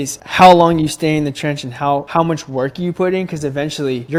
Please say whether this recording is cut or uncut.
uncut